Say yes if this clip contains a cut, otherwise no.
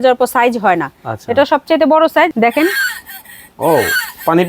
yes